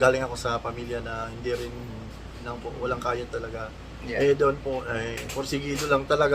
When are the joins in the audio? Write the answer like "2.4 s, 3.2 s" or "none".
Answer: 2.4 s